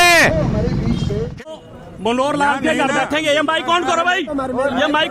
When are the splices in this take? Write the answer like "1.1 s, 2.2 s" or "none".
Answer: 1.5 s